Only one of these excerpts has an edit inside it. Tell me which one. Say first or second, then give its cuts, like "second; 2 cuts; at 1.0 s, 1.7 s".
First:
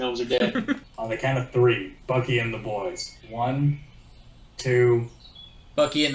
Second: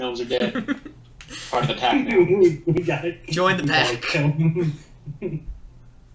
first; 3 cuts; at 0.9 s, 1.9 s, 3.1 s